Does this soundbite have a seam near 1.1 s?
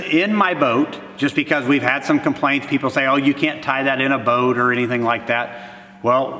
no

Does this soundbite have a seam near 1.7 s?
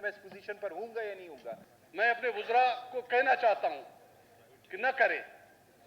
yes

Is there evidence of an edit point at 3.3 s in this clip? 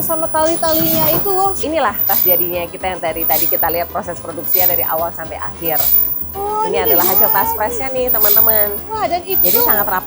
no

